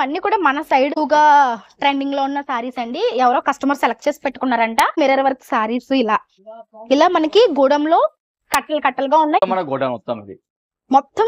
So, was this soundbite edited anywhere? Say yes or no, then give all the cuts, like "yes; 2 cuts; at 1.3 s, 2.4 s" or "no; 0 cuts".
yes; 3 cuts; at 0.9 s, 4.9 s, 9.4 s